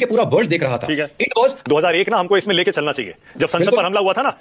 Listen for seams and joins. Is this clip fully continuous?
no; 1 cut; at 1.6 s

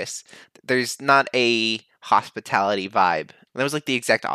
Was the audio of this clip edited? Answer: no; 0 cuts

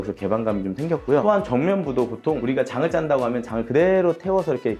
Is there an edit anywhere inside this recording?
no; 0 cuts

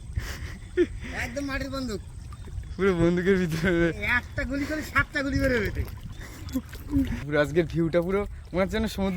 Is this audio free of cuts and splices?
no; 1 cut; at 7.3 s

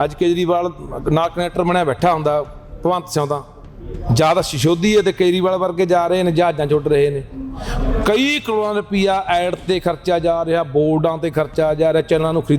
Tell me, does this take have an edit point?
no; 0 cuts

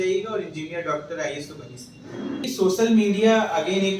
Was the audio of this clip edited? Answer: yes; 1 cut; at 2.4 s

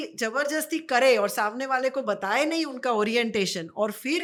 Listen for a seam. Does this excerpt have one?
no; 0 cuts

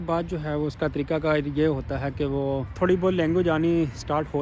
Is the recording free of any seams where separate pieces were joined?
no; 1 cut; at 2.8 s

